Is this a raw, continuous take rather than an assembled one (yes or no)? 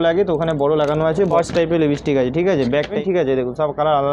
no